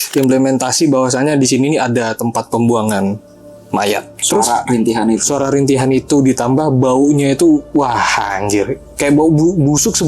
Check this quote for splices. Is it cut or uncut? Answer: cut